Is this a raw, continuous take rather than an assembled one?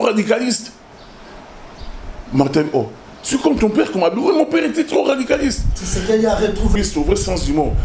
no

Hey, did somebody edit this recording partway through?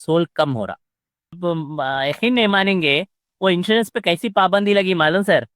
yes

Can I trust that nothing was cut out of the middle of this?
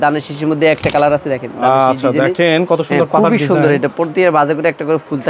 yes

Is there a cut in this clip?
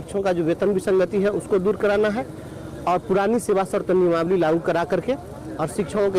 no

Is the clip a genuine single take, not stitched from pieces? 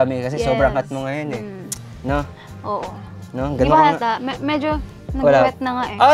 yes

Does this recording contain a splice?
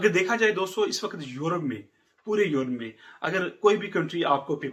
no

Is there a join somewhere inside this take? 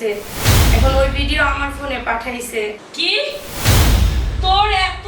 yes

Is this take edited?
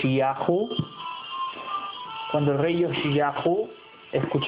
no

